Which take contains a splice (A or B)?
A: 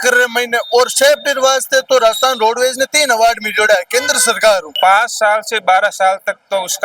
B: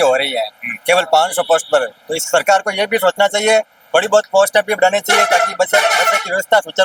A